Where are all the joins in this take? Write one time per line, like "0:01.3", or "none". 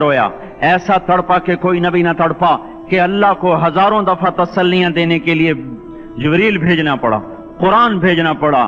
0:02.7